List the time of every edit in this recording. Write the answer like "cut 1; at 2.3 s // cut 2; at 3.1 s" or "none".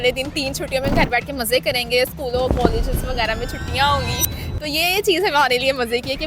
cut 1; at 0.9 s